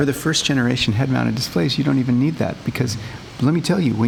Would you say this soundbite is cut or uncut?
uncut